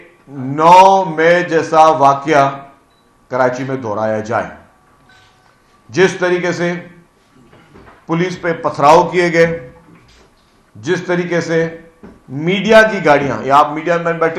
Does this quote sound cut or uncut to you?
uncut